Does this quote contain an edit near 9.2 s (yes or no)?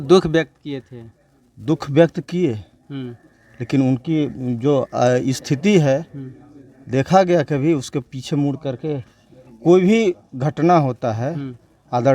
no